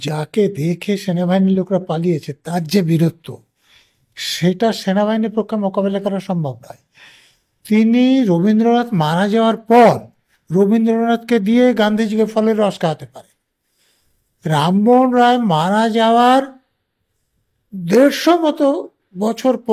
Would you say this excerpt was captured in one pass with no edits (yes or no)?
yes